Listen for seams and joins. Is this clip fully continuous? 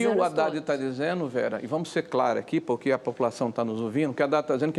yes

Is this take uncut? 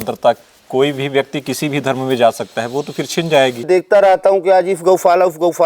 no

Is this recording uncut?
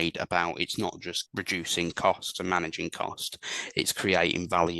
no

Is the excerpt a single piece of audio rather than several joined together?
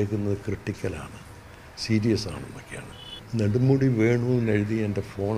no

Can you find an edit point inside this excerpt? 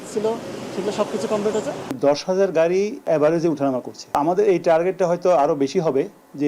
yes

